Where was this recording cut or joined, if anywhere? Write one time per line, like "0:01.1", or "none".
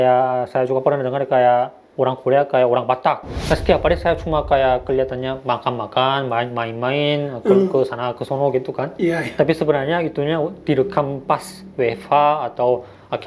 0:03.3